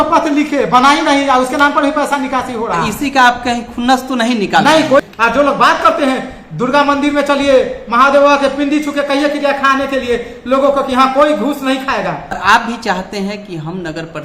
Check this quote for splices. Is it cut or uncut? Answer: cut